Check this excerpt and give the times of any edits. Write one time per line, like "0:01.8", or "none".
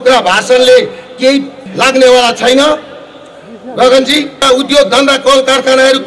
0:01.7
0:04.4

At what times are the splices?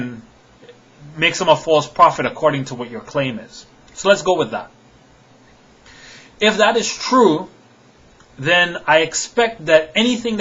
0:04.1

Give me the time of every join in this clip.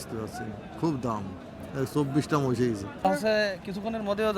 0:03.0

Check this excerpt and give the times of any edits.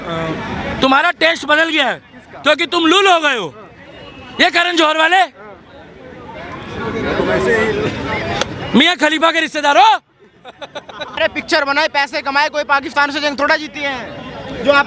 0:11.1

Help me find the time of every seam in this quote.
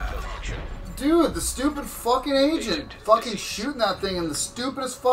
none

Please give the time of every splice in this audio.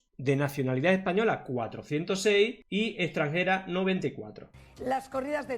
0:04.5

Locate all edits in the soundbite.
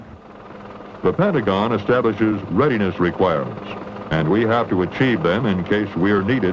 0:02.9

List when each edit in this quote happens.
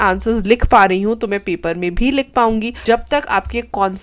0:02.7

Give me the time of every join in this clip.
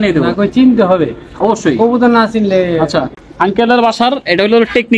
0:03.2

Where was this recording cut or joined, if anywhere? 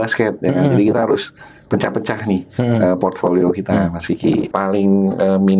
0:04.5

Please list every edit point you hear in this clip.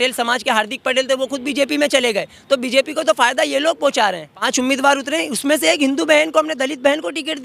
0:04.5

